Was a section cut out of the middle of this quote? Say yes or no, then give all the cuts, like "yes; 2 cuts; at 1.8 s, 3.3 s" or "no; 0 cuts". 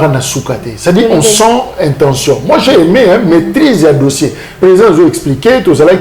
no; 0 cuts